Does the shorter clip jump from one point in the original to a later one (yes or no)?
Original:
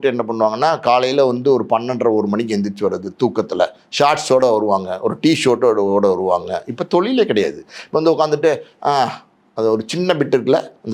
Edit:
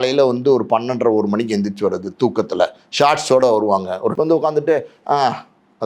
yes